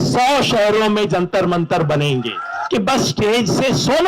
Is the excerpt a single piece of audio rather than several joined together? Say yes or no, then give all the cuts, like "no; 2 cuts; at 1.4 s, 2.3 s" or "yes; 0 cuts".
no; 1 cut; at 2.5 s